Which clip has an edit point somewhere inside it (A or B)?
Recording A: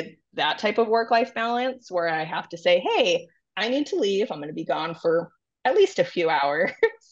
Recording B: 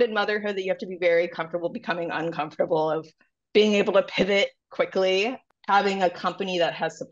B